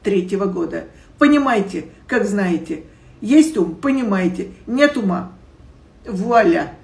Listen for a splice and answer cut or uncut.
uncut